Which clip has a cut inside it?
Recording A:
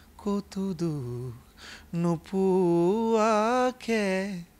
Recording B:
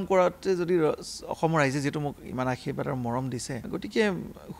B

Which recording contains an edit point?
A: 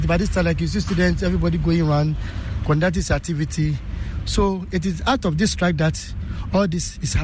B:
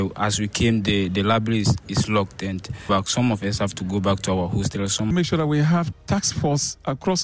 B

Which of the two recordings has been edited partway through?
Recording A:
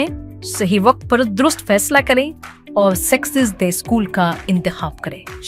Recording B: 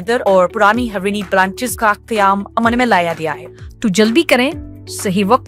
B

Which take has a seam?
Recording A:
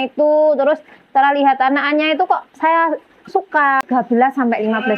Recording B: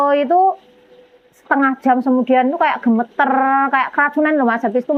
A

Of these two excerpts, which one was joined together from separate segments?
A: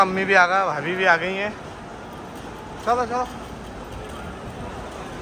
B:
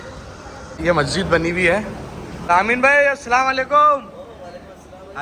B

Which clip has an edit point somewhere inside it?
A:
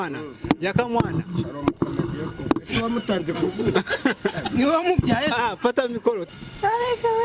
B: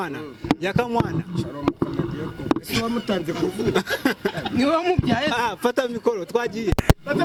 A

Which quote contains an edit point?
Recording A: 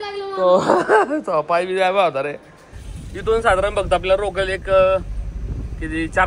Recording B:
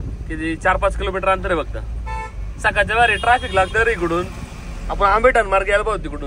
A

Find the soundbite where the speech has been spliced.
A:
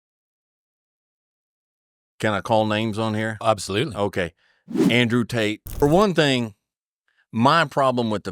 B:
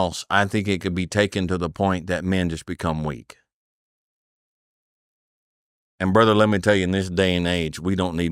A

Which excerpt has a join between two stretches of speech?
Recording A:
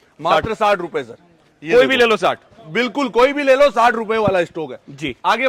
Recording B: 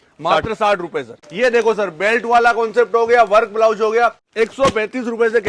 B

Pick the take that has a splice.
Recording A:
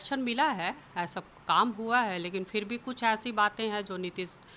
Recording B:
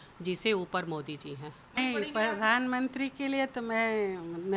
B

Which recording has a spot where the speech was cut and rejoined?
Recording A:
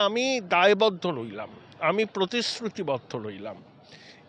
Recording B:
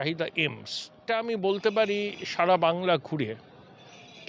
B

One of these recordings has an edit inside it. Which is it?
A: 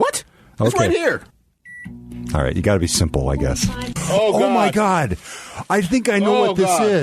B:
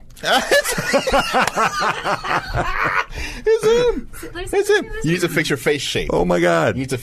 A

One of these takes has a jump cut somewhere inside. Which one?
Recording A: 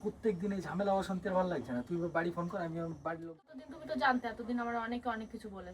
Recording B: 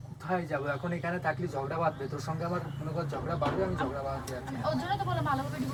A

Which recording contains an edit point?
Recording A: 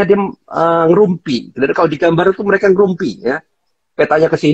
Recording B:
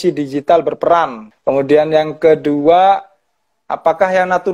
B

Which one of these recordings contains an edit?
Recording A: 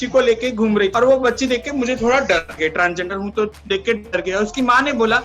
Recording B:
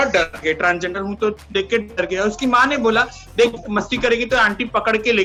A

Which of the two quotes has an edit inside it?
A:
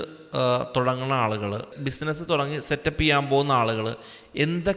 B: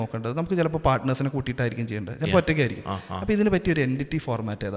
A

